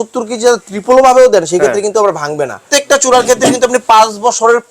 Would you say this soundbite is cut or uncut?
cut